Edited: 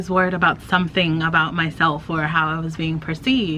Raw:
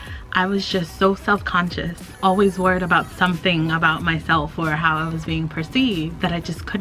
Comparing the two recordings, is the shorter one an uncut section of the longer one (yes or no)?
yes